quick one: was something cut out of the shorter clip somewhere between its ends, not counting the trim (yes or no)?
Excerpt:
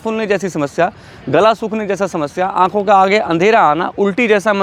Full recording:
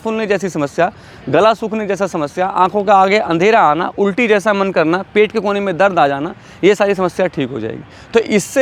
no